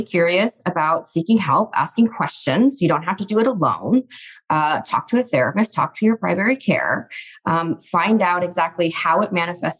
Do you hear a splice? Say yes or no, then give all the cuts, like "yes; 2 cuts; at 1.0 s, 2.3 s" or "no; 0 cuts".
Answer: no; 0 cuts